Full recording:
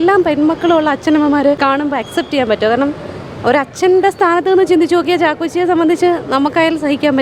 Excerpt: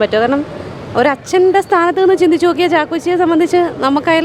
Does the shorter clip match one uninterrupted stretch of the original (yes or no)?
yes